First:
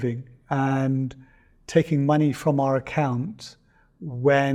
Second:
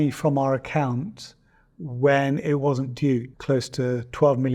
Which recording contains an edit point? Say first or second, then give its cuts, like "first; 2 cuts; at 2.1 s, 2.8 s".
second; 1 cut; at 3.3 s